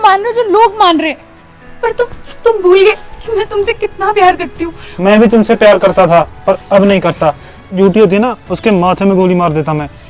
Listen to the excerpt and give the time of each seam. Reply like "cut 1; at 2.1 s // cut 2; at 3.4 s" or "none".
cut 1; at 7.7 s